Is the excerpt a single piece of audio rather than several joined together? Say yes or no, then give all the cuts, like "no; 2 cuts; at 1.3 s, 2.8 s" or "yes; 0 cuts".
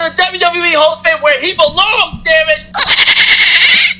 no; 1 cut; at 2.6 s